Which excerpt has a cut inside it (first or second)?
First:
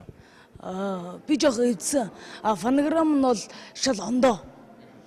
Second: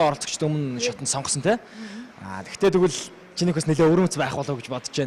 second